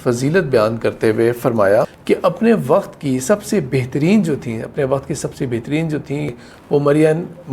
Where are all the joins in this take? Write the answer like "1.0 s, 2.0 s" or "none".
2.0 s, 6.3 s